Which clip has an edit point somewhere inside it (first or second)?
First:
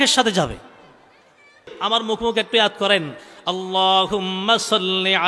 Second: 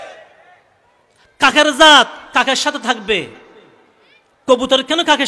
first